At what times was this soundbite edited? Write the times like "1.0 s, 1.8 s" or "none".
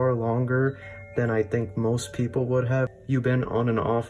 2.9 s